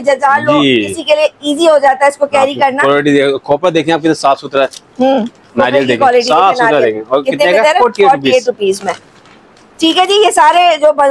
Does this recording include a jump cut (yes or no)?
no